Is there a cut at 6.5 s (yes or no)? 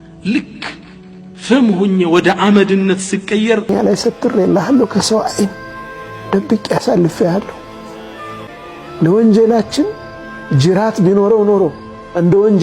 no